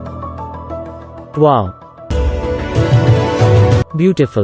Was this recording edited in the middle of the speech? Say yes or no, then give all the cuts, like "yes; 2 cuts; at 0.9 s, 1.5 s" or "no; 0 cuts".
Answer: no; 0 cuts